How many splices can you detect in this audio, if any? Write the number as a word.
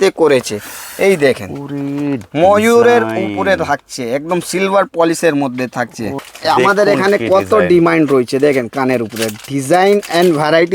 one